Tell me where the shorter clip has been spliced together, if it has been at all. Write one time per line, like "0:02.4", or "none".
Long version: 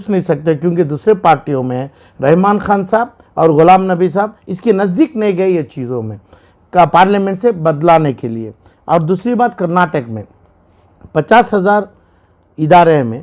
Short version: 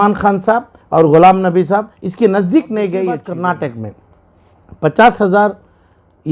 0:03.3